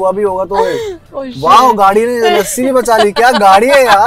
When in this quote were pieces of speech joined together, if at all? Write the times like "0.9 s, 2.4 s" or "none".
none